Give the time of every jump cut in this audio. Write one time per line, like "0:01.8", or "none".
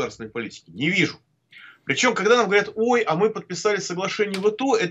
none